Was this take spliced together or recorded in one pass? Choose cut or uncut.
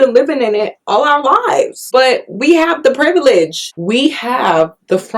cut